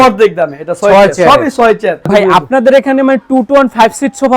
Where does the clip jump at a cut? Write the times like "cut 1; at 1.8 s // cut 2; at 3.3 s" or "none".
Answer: cut 1; at 2.1 s